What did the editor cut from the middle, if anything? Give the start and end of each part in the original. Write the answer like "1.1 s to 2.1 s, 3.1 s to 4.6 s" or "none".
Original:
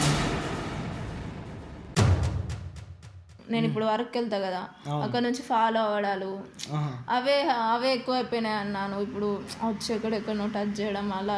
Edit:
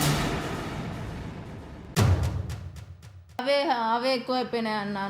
3.4 s to 7.2 s